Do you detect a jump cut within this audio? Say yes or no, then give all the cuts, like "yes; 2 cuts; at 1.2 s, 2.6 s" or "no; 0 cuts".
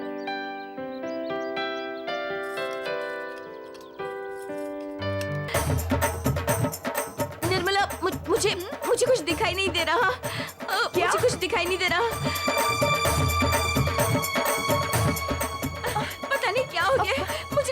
yes; 1 cut; at 5.5 s